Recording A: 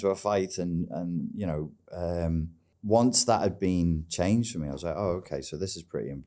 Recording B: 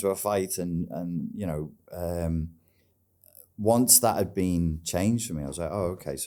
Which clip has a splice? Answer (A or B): A